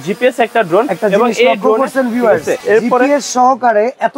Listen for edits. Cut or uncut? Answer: cut